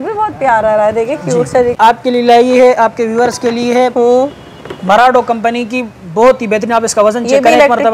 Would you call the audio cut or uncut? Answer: cut